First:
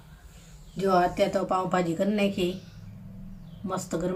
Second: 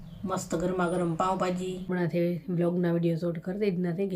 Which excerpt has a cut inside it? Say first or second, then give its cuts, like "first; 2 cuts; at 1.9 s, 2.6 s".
second; 1 cut; at 1.9 s